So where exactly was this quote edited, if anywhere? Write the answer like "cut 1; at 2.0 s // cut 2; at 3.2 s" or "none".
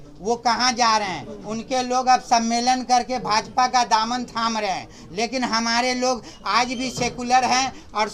none